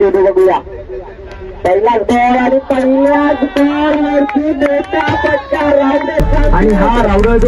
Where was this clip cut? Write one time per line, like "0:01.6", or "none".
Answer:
0:06.5